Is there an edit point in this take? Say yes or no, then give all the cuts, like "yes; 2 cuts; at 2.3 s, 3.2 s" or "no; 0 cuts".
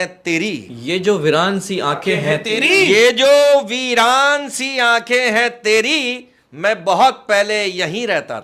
no; 0 cuts